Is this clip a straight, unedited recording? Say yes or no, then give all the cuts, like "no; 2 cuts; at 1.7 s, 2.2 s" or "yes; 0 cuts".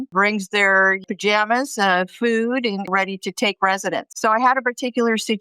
no; 1 cut; at 4.1 s